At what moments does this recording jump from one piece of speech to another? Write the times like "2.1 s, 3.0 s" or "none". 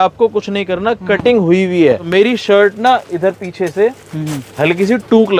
2.0 s